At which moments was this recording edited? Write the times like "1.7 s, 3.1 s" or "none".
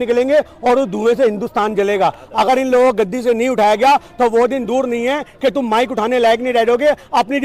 none